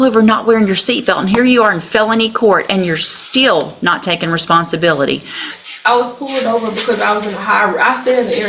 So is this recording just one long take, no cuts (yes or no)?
no